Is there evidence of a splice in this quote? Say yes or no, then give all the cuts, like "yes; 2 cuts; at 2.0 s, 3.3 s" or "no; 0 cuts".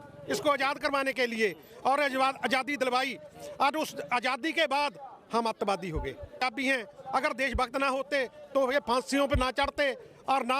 yes; 1 cut; at 6.4 s